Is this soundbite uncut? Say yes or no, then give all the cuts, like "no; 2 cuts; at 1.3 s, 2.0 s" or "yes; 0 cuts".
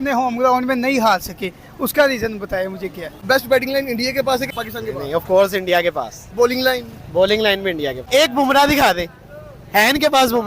no; 3 cuts; at 3.2 s, 4.5 s, 8.0 s